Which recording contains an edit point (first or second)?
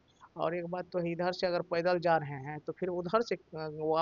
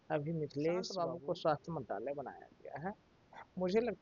second